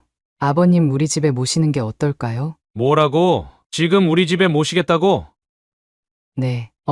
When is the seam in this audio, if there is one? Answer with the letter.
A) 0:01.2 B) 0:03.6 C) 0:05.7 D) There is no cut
B